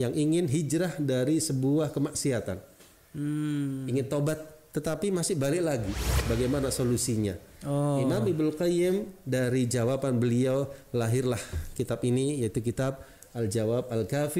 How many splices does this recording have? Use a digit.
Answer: 1